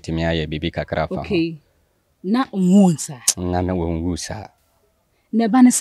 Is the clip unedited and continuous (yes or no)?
yes